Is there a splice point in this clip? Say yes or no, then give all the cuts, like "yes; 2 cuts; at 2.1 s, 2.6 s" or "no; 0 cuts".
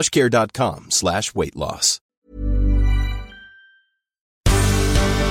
yes; 2 cuts; at 1.9 s, 4.4 s